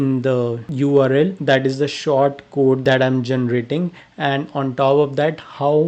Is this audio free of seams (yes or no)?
yes